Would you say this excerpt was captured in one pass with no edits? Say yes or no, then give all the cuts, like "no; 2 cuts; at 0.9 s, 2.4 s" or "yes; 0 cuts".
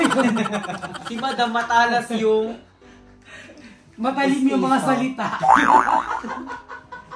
yes; 0 cuts